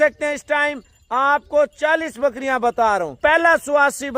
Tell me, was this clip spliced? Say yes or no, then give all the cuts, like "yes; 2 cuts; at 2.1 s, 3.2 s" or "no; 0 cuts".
yes; 1 cut; at 3.2 s